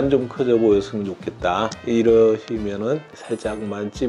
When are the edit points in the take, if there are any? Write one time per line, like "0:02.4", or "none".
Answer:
0:03.1

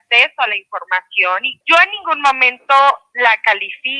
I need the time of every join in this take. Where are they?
0:01.5

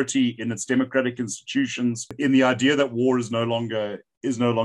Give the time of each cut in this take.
0:02.1

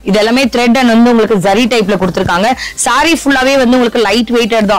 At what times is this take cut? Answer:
none

